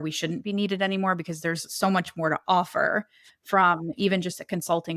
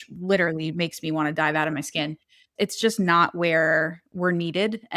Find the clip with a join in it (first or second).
second